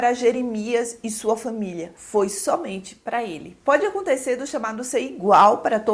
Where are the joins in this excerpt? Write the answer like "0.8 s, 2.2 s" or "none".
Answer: none